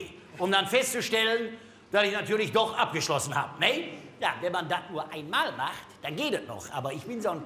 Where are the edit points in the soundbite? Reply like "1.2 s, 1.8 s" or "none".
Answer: 4.3 s